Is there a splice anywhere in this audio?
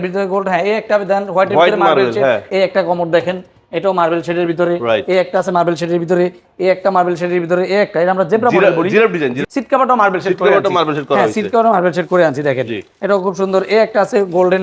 yes; 2 cuts; at 2.4 s, 9.4 s

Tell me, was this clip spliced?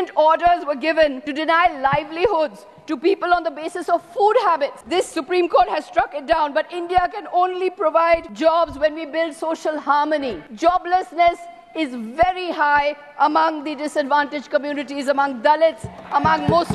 yes; 4 cuts; at 1.3 s, 4.8 s, 8.3 s, 10.4 s

